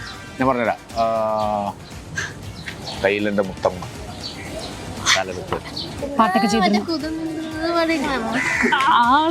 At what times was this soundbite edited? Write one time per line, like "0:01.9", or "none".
0:06.1